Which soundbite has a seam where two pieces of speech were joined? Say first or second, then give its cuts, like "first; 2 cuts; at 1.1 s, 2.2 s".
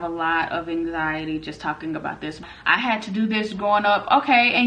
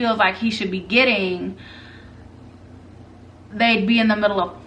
first; 1 cut; at 2.4 s